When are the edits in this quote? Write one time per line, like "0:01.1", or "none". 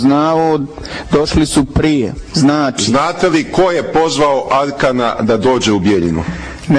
0:02.6